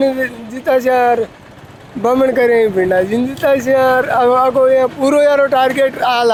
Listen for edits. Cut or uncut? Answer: uncut